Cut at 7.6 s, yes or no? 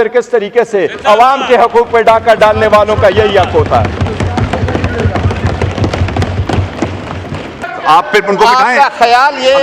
yes